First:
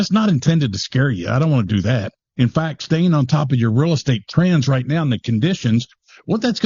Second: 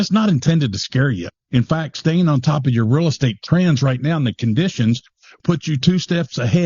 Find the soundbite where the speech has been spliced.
second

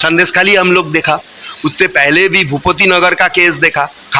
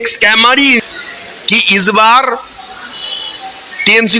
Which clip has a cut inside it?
second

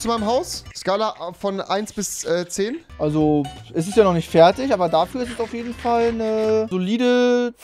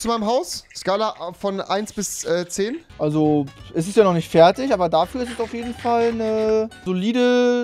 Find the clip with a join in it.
first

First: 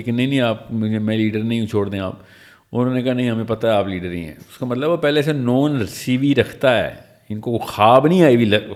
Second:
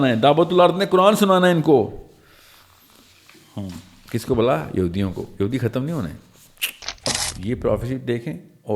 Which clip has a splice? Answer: second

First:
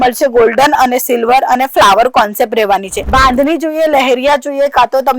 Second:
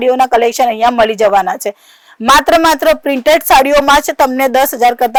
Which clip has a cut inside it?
first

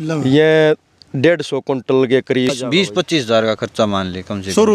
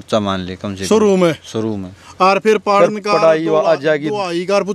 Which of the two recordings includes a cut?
first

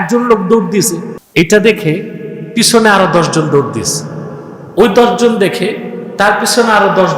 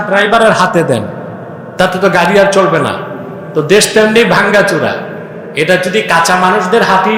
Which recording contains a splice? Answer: first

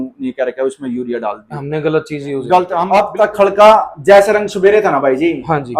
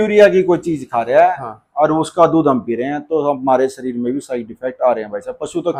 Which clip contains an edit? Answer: first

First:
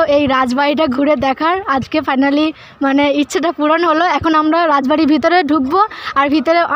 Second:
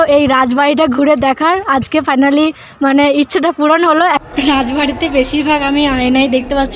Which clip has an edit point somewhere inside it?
second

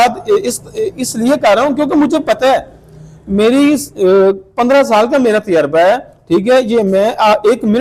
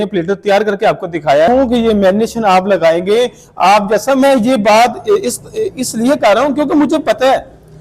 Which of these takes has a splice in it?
second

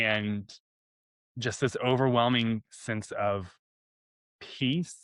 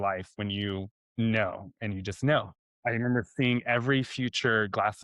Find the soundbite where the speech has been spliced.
second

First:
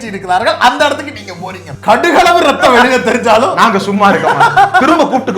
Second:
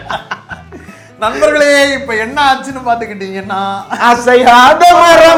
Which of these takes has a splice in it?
first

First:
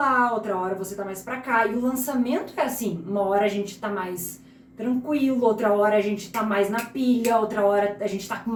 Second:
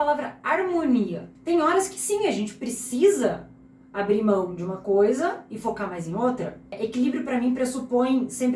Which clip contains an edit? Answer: second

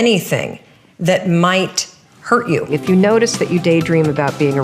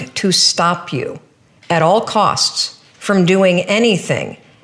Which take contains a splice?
first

